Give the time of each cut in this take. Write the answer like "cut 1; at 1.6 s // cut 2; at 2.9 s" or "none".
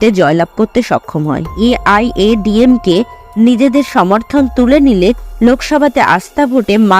cut 1; at 1.5 s